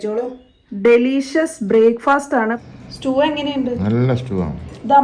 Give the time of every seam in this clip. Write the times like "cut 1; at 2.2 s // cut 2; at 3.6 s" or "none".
cut 1; at 2.6 s